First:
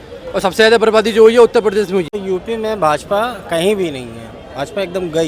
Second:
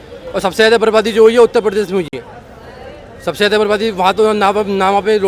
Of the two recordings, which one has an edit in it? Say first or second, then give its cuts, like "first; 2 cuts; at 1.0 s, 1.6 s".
first; 1 cut; at 2.1 s